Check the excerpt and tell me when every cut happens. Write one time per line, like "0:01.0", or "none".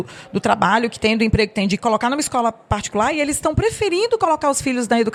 none